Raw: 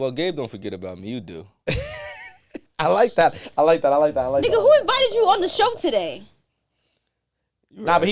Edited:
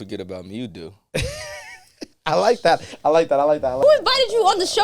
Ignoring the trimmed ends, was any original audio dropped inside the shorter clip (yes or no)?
yes